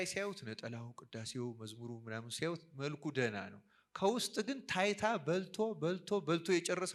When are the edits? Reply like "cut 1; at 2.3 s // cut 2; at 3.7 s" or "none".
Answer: none

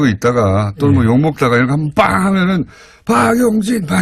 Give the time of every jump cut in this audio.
cut 1; at 3.1 s

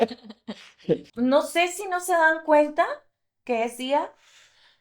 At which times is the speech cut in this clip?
cut 1; at 1.1 s

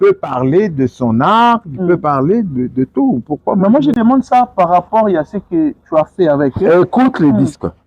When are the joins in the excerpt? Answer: none

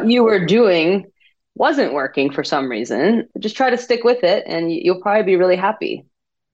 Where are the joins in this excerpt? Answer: cut 1; at 3.3 s

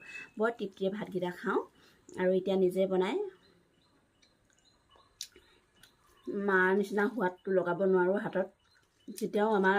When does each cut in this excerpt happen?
cut 1; at 4.9 s

